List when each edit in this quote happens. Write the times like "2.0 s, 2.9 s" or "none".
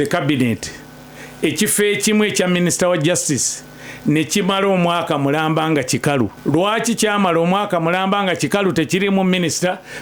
6.4 s

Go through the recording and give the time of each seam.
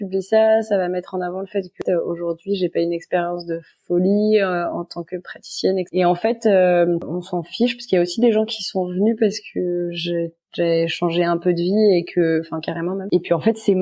1.8 s, 5.9 s, 7.2 s, 13.0 s

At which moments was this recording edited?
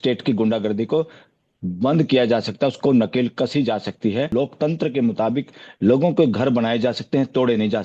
4.3 s

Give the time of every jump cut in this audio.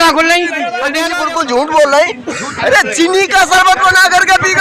1.1 s

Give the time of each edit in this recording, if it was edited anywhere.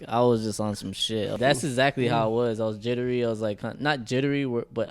1.4 s

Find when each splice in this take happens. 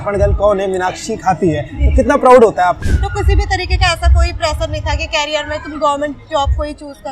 2.8 s

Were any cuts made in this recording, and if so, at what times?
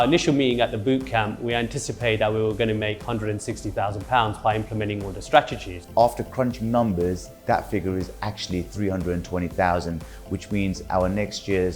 none

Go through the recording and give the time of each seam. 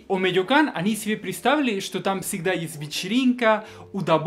none

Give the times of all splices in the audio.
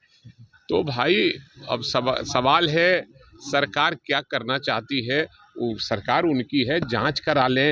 none

